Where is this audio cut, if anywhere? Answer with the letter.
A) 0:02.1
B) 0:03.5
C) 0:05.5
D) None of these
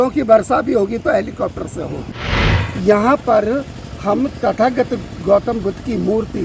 A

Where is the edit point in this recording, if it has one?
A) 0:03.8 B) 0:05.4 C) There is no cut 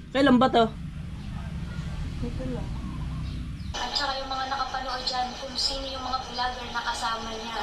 A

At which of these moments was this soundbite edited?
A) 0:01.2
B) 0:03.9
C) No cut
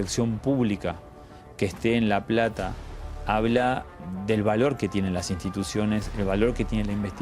B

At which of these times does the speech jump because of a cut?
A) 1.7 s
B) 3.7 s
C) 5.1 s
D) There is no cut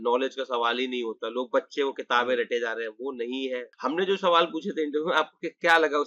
B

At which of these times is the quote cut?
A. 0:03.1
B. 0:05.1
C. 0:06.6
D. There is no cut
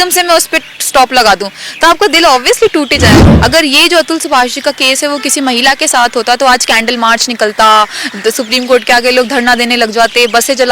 A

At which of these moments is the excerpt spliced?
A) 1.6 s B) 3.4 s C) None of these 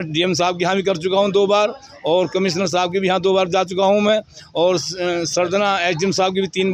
C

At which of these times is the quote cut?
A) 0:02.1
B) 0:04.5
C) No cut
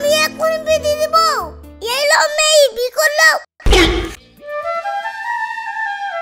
B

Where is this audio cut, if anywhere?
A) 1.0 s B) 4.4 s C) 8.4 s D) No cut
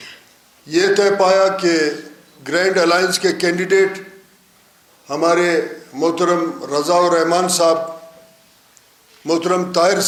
D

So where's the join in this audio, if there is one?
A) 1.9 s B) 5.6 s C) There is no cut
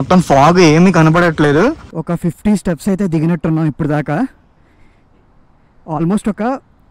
A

